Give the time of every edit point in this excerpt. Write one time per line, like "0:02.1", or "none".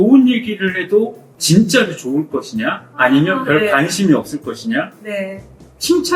none